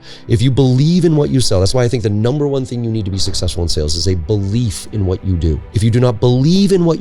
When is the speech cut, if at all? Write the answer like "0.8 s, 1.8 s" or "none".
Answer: 5.7 s